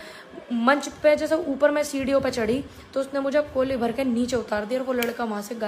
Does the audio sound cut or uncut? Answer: uncut